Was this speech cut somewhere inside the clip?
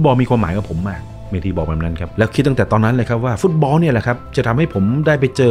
no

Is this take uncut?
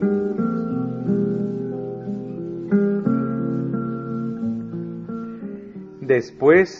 yes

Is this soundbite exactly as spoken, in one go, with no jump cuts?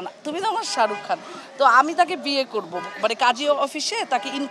yes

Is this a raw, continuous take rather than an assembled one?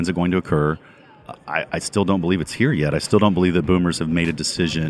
yes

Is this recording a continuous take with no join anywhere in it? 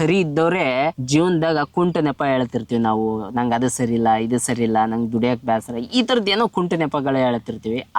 no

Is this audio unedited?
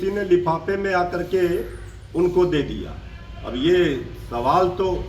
yes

